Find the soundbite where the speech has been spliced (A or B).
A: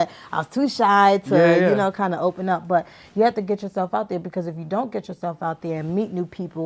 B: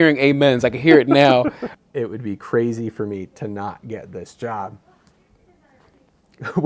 B